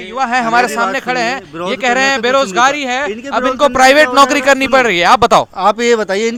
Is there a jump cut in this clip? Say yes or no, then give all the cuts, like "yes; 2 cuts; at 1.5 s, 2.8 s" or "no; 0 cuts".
no; 0 cuts